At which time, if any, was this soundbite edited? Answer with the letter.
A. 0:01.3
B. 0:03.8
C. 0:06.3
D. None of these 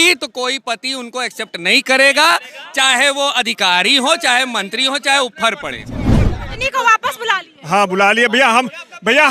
C